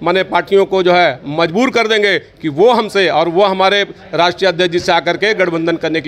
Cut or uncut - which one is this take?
uncut